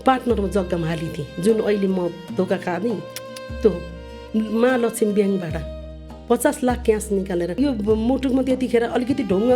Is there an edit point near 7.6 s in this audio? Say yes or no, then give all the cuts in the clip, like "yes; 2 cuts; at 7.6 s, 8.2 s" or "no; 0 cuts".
yes; 1 cut; at 7.6 s